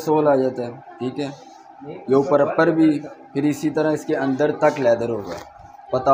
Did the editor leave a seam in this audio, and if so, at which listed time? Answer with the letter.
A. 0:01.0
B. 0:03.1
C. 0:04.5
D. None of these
D